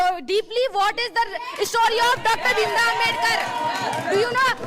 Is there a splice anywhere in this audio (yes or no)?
no